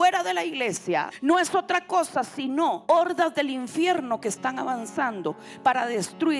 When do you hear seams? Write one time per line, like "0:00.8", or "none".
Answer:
0:01.1
0:02.8